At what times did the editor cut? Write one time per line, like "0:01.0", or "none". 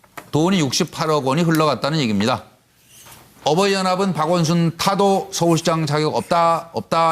0:04.8